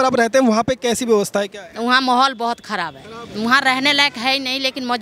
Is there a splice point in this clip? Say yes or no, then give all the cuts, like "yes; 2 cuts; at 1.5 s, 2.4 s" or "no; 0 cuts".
no; 0 cuts